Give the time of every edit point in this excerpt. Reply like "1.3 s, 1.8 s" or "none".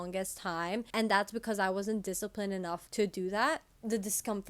0.9 s, 2.8 s, 3.7 s